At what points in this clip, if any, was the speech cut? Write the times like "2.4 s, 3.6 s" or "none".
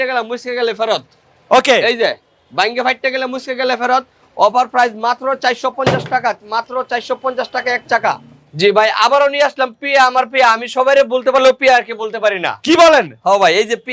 none